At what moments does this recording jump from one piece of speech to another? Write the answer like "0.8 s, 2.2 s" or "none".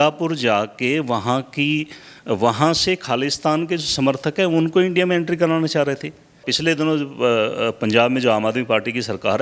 6.5 s